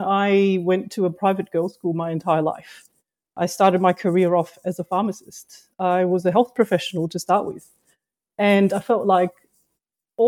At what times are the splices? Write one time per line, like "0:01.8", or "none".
none